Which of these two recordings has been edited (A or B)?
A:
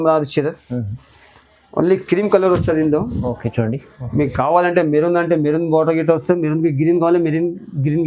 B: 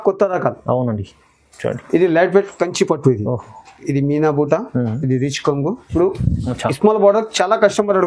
B